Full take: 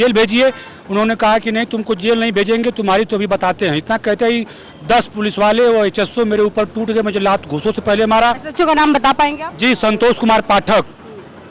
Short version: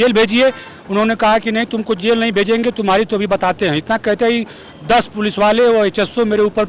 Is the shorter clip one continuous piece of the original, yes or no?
yes